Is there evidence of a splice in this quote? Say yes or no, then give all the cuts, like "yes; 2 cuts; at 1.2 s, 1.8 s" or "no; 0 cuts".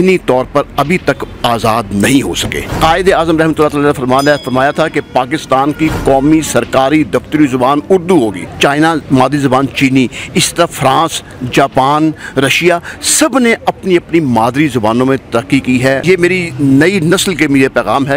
yes; 3 cuts; at 2.6 s, 8.4 s, 16.0 s